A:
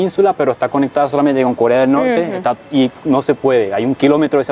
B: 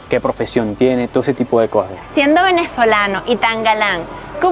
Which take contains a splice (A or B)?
B